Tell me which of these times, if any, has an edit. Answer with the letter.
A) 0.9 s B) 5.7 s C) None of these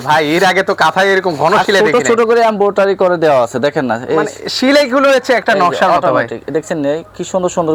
C